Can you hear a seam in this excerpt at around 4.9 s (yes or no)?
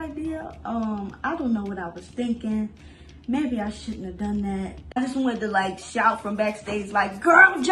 yes